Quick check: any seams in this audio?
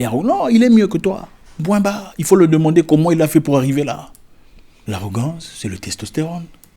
yes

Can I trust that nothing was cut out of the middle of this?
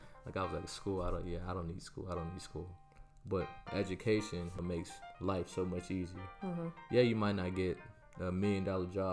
no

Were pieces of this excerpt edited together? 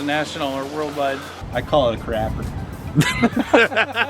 yes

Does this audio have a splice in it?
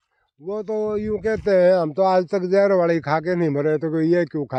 no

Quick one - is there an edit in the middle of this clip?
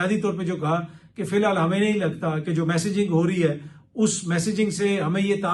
no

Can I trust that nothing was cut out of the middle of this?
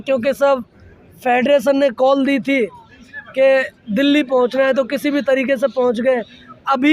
yes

